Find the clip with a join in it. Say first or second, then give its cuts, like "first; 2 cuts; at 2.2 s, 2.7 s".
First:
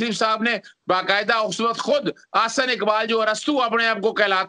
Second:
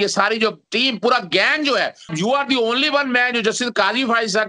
second; 1 cut; at 2.1 s